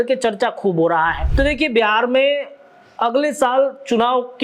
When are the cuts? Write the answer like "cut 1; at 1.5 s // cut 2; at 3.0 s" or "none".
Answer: cut 1; at 1.2 s